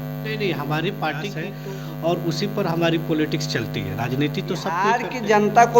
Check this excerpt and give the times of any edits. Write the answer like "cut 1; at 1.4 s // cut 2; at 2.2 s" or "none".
cut 1; at 1.5 s // cut 2; at 4.8 s